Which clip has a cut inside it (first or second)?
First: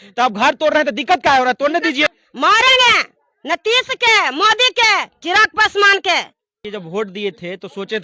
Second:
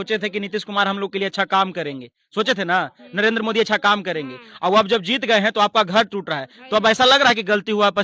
first